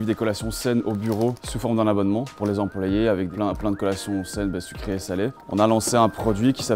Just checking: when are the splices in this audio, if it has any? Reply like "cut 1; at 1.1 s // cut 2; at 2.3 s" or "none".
cut 1; at 1.5 s // cut 2; at 2.3 s // cut 3; at 3.3 s // cut 4; at 5.4 s